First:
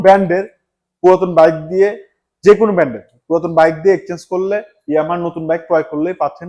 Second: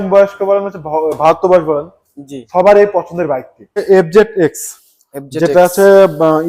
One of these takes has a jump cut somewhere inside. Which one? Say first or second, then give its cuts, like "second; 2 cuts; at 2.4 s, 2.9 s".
second; 1 cut; at 3.8 s